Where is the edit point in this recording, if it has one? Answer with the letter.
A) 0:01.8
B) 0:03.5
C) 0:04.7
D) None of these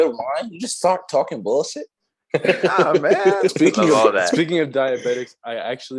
B